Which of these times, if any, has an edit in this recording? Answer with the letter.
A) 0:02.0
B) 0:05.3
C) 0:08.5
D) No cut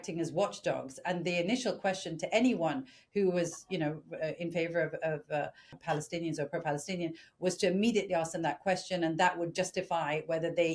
D